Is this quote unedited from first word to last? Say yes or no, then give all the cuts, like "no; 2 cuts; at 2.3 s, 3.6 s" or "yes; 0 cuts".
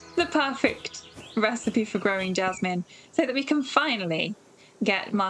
yes; 0 cuts